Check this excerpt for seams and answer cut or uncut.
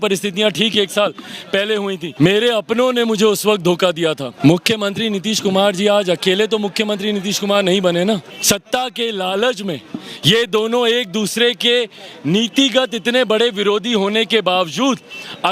cut